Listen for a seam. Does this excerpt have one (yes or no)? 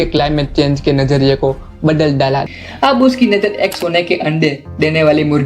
yes